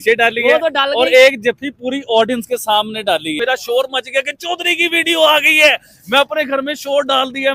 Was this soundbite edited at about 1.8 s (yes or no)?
no